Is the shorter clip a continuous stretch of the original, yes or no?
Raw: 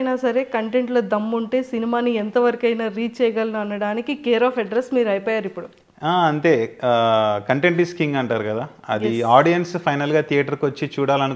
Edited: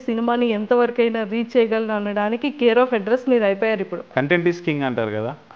no